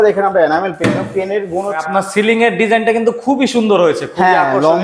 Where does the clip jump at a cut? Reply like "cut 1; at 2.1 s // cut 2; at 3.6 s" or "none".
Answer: cut 1; at 1.8 s